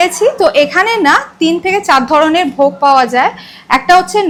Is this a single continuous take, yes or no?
yes